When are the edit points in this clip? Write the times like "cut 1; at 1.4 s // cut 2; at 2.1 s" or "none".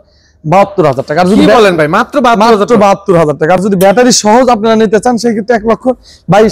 none